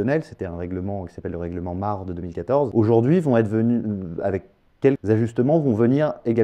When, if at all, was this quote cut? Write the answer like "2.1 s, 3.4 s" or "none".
2.7 s, 5.0 s